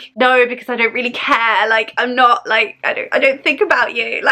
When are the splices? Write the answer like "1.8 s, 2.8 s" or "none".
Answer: none